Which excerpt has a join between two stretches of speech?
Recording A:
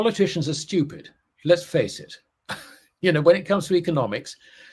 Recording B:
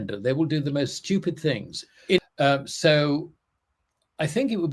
B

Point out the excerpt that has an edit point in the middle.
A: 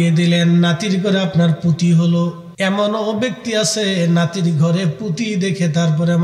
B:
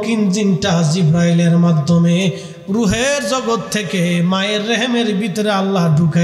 A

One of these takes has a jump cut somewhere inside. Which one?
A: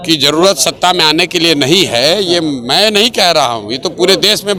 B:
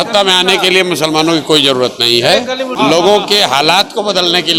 B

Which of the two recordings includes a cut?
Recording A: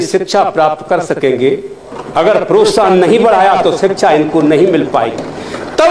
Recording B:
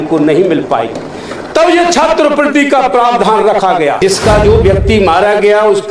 B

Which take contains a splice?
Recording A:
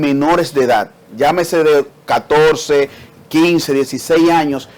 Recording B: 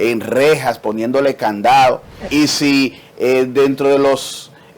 B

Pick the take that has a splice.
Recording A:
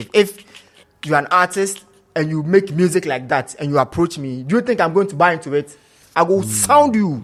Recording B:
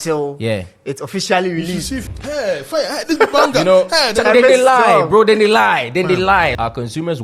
B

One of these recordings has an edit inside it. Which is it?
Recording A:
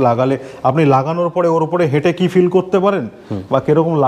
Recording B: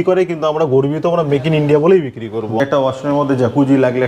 B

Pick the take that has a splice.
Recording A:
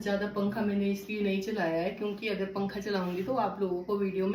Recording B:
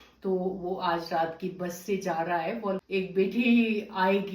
B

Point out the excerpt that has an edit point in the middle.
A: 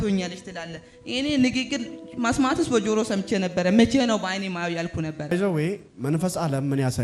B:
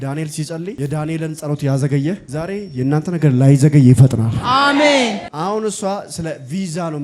B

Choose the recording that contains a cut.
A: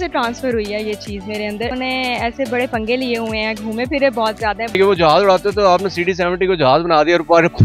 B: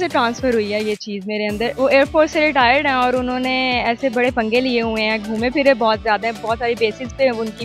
A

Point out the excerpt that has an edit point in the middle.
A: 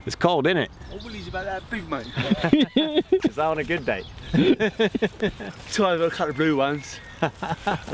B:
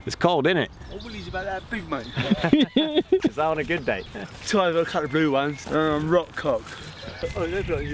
B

